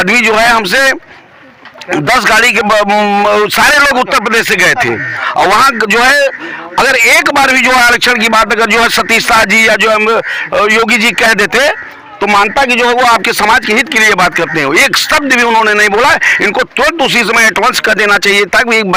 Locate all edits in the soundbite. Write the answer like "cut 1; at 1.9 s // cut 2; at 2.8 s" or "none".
none